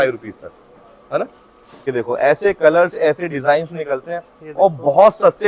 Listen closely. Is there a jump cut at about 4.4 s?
no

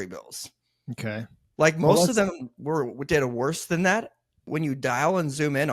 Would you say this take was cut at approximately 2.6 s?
no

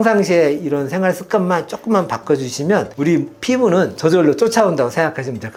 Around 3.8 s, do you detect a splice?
no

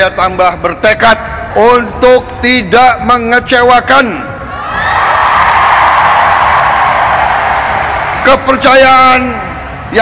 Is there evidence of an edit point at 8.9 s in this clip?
no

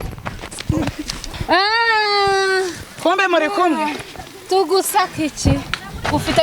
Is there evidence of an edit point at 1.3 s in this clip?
yes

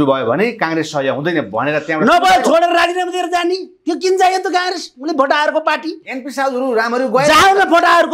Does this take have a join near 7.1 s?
no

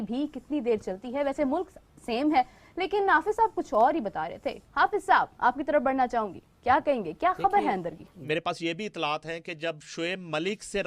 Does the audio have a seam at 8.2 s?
yes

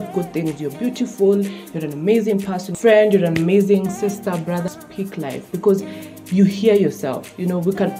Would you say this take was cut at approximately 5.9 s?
no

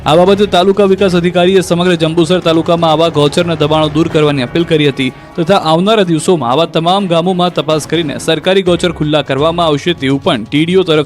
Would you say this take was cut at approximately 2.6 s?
yes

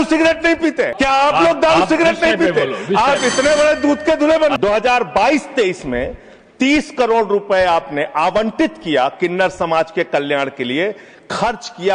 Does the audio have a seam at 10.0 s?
no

